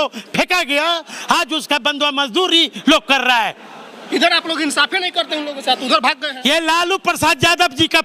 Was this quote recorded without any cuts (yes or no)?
yes